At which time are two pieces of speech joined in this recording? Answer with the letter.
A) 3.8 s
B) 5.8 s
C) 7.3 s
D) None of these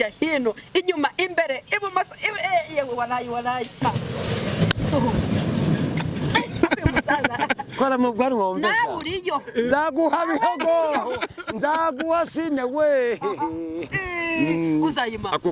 A